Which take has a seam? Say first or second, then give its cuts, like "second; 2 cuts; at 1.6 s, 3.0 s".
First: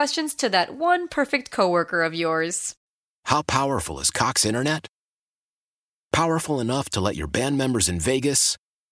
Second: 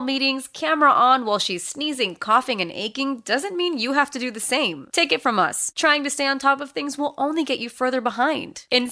first; 1 cut; at 2.8 s